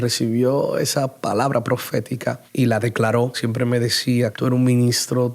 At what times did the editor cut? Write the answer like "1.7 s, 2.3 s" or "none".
3.4 s, 4.3 s